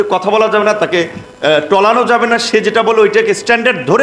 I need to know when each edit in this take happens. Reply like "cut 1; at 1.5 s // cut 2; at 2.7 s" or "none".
none